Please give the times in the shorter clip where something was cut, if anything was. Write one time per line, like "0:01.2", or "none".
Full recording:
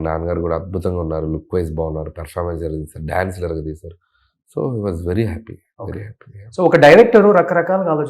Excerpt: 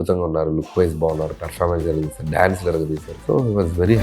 0:03.1